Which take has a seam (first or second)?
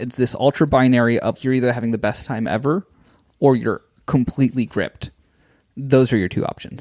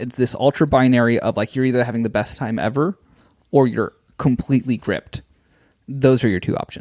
first